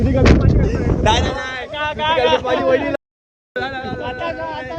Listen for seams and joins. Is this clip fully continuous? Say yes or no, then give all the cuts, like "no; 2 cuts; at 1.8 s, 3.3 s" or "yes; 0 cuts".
yes; 0 cuts